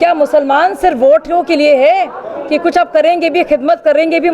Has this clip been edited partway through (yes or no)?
no